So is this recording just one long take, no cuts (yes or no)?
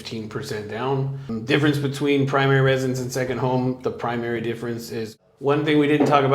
no